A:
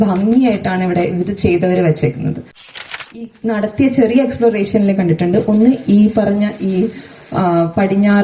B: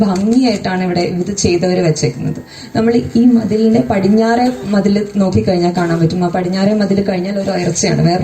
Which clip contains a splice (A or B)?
A